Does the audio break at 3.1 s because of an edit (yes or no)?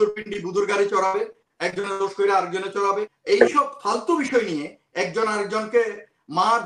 yes